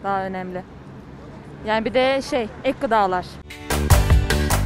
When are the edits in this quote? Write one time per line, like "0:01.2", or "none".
0:03.3